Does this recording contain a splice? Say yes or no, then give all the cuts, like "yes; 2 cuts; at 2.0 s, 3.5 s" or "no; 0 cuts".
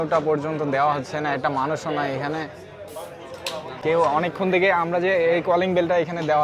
yes; 1 cut; at 3.8 s